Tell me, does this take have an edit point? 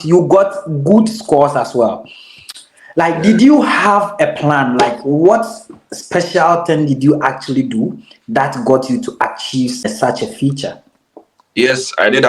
yes; 1 cut; at 9.8 s

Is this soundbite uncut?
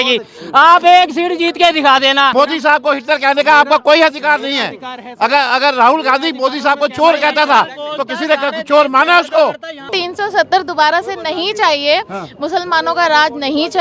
no; 2 cuts; at 2.3 s, 10.0 s

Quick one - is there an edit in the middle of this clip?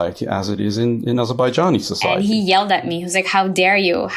yes; 1 cut; at 2.1 s

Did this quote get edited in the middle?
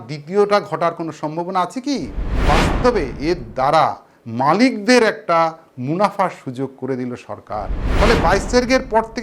yes; 2 cuts; at 2.2 s, 7.8 s

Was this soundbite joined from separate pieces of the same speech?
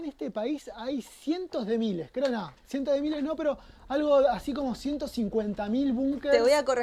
no; 0 cuts

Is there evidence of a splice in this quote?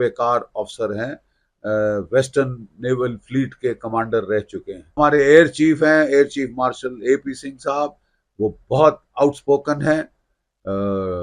yes; 1 cut; at 5.0 s

